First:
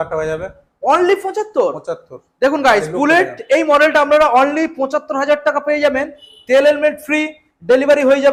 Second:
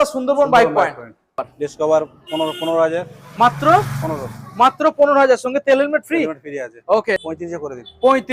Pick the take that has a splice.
second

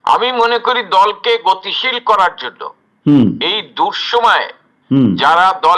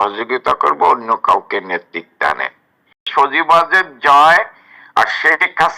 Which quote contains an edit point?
second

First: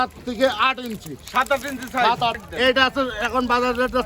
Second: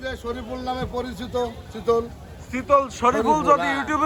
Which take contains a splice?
first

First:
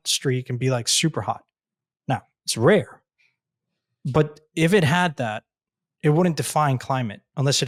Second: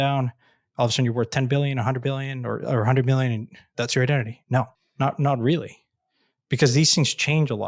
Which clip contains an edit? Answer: second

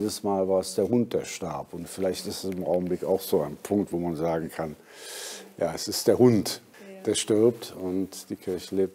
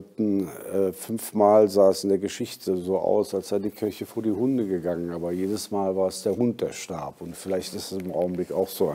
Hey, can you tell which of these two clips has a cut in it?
first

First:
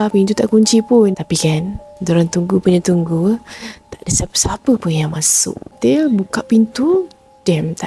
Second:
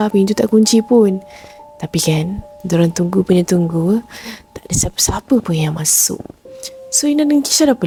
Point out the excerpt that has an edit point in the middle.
first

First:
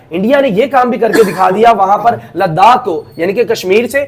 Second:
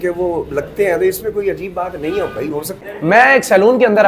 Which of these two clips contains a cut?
second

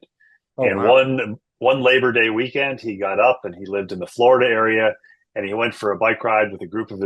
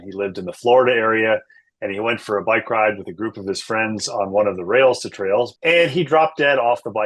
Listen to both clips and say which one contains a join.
second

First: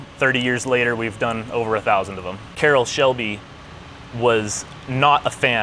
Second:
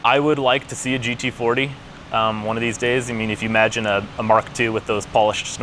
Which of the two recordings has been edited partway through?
first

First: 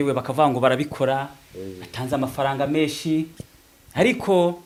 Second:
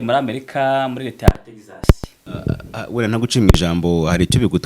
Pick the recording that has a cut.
second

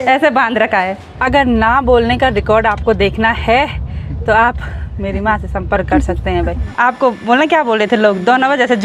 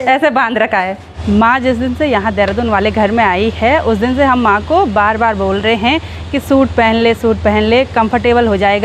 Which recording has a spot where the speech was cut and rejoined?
first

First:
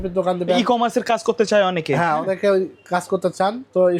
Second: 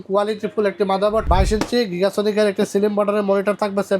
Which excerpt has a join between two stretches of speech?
second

